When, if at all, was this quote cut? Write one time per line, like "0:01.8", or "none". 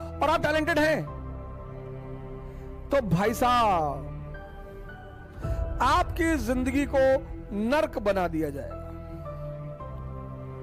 none